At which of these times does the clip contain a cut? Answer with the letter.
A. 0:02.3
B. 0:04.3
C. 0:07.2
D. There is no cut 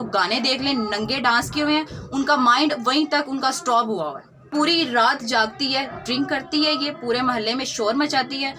B